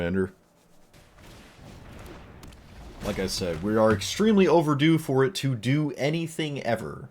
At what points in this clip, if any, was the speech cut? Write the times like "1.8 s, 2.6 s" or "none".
1.0 s